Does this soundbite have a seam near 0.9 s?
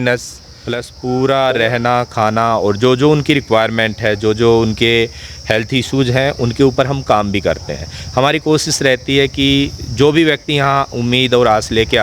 yes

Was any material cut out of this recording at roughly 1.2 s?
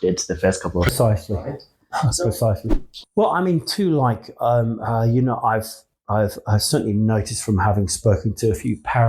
no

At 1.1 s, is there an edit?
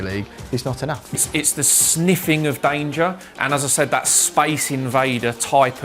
yes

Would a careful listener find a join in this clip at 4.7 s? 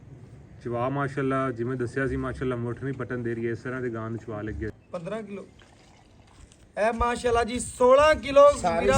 yes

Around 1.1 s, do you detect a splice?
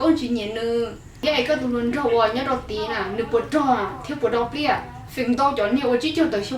yes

